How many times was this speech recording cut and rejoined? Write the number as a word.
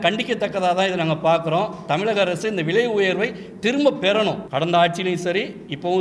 one